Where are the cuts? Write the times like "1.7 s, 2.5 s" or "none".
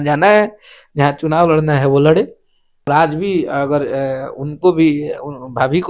2.9 s

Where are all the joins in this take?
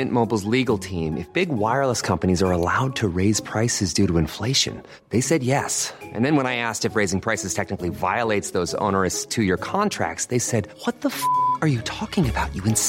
none

